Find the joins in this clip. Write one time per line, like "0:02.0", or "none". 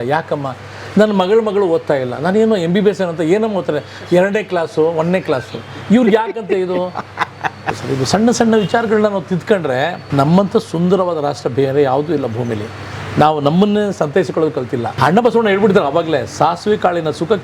0:07.8
0:10.0
0:14.9